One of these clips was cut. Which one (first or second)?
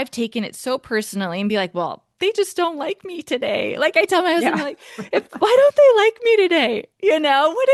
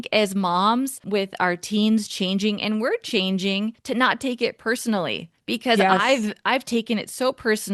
second